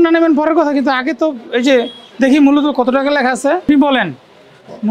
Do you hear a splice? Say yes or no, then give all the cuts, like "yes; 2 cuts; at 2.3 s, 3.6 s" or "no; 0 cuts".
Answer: yes; 1 cut; at 3.6 s